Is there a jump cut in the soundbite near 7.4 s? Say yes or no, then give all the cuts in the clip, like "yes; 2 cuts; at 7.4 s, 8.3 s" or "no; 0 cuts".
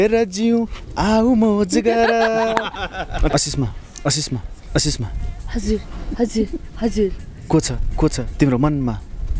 no; 1 cut; at 3.3 s